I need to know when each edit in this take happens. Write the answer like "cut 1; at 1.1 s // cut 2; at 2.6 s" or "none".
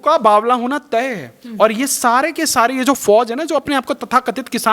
none